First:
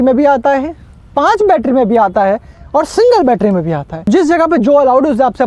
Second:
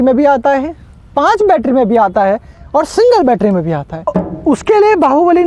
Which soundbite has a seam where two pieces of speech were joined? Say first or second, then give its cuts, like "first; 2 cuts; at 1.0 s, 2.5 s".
second; 1 cut; at 4.1 s